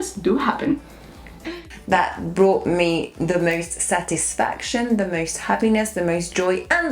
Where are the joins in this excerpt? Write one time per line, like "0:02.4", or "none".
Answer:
0:01.7